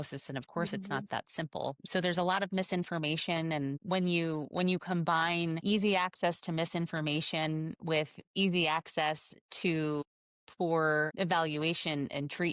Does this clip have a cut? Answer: no; 0 cuts

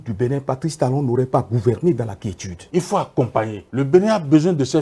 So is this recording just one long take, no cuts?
no; 2 cuts; at 2.6 s, 3.6 s

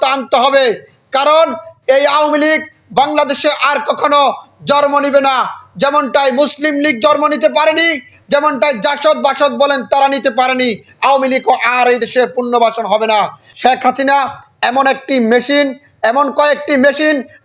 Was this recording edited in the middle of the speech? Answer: yes; 1 cut; at 13.4 s

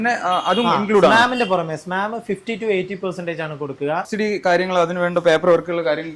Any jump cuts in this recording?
yes; 1 cut; at 4.1 s

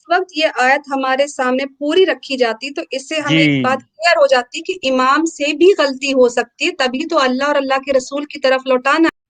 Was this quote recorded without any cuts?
yes; 0 cuts

